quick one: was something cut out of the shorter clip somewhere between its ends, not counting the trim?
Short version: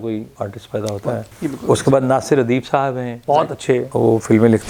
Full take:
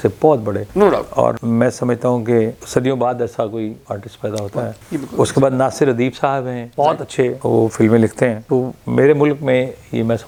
no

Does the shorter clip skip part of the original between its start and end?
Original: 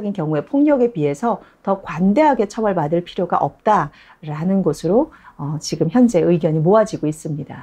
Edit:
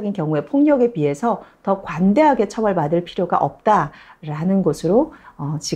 no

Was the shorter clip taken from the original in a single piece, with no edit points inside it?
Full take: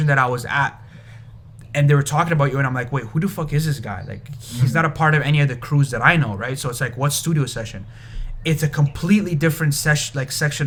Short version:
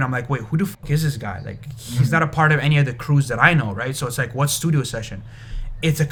yes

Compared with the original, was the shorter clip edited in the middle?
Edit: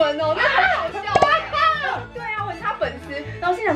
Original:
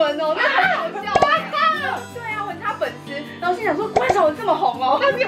no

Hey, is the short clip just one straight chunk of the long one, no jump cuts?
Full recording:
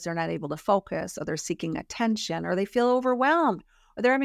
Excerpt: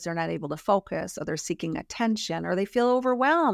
yes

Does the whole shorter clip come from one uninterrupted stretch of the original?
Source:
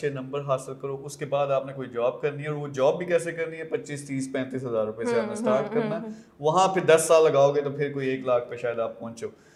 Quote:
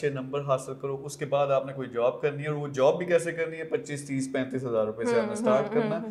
yes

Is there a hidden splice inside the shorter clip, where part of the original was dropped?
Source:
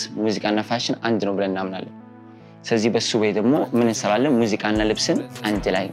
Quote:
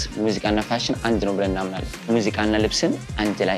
yes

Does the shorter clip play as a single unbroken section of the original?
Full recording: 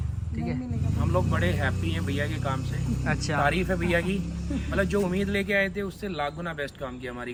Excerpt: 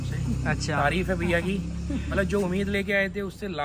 yes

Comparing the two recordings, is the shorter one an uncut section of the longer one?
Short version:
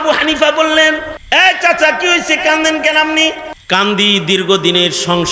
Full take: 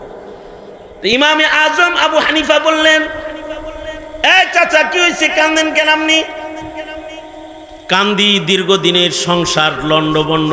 no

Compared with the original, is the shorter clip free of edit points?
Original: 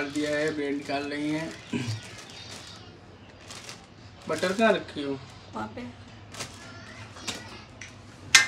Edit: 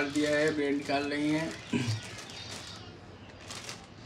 yes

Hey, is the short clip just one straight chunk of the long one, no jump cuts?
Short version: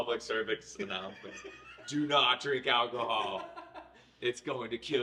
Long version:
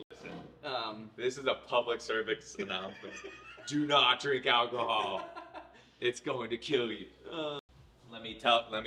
yes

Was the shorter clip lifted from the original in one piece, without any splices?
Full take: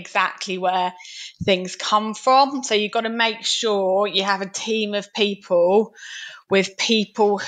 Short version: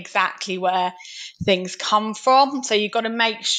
yes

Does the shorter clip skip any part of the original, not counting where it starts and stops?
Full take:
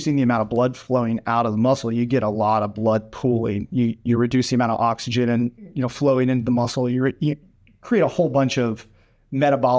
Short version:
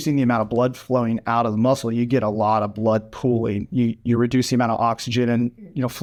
no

